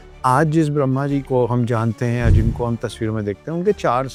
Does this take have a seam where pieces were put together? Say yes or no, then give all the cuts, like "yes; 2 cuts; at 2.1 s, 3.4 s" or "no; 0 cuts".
no; 0 cuts